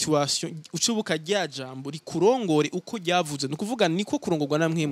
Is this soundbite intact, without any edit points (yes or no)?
yes